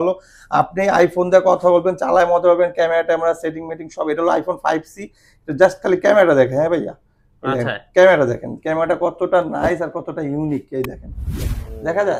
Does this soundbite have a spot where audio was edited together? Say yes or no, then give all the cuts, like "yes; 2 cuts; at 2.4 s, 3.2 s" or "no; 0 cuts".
no; 0 cuts